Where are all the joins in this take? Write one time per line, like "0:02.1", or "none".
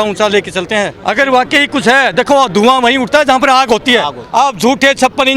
0:01.0
0:04.2